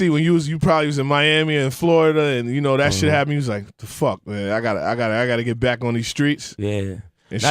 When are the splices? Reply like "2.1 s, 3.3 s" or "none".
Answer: 3.7 s